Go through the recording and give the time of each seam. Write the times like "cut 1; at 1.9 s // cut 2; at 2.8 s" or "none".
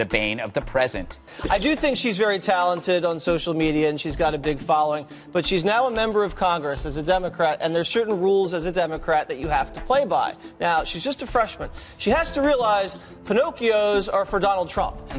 cut 1; at 1.0 s